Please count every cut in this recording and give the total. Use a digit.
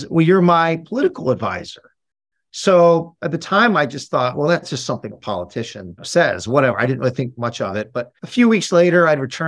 3